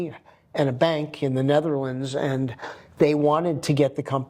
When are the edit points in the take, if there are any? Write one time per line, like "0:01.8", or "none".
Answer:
none